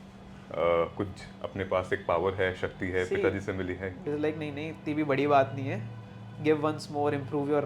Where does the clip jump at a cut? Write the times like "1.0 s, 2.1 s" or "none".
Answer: 3.9 s